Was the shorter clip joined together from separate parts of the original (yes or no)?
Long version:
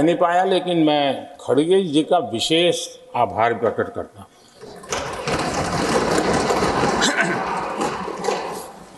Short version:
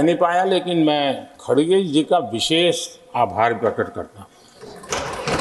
no